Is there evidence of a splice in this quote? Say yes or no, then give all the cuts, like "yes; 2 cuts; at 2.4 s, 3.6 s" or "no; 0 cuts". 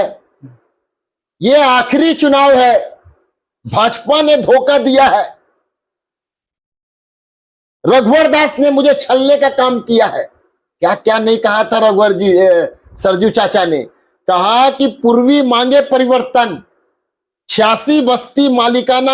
no; 0 cuts